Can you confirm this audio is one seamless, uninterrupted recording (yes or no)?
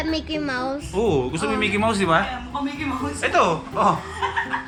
yes